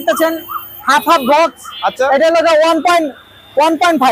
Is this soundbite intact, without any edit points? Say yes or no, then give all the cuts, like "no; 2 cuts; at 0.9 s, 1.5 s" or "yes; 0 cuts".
yes; 0 cuts